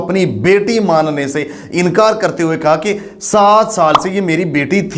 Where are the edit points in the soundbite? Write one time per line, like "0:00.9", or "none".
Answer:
none